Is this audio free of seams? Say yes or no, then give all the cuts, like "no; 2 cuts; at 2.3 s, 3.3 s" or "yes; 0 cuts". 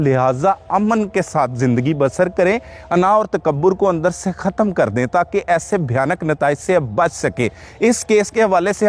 yes; 0 cuts